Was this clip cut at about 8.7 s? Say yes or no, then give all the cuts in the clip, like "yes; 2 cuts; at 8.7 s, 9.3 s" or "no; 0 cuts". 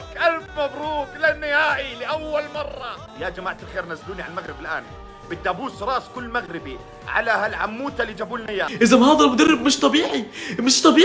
yes; 2 cuts; at 3.1 s, 8.7 s